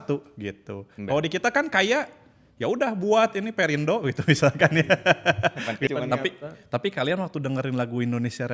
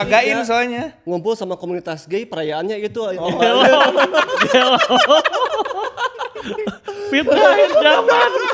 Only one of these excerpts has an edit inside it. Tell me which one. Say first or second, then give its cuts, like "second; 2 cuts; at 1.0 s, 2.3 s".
first; 1 cut; at 5.9 s